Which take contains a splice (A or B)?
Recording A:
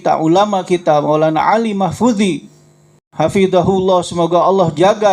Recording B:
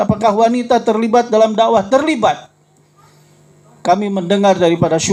A